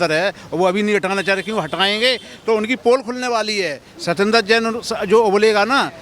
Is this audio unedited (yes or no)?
yes